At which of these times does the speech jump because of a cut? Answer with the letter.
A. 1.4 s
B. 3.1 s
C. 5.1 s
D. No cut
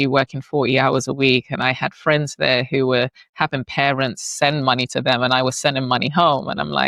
D